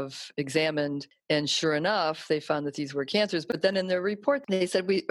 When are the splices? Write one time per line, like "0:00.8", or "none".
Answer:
0:01.1